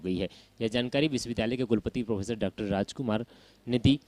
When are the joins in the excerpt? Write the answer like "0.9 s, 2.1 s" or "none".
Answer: 1.3 s, 3.2 s